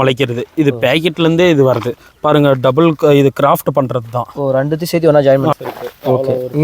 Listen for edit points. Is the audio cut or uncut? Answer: cut